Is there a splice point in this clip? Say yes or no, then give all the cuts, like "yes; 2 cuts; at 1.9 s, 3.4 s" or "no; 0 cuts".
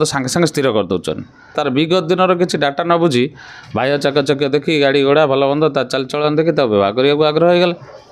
yes; 1 cut; at 1.6 s